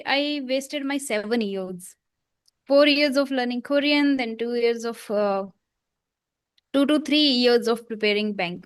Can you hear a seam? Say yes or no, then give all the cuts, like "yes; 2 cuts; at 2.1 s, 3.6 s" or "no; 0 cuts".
no; 0 cuts